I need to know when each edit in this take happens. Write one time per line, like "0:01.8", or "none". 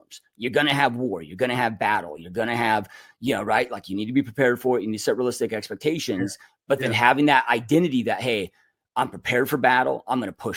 none